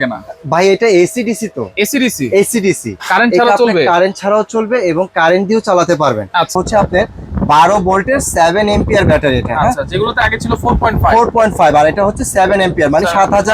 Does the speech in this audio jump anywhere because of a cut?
yes; 1 cut; at 6.6 s

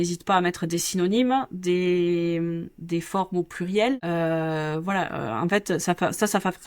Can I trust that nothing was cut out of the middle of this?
no; 1 cut; at 4.0 s

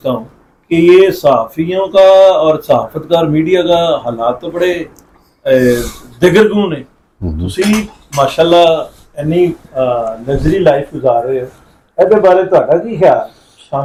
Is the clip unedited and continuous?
yes; 0 cuts

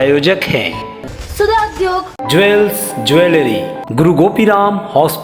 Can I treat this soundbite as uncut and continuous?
no; 1 cut; at 3.8 s

